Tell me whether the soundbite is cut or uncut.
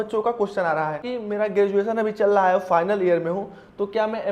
cut